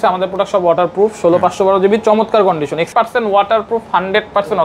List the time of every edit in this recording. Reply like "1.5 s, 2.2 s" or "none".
2.9 s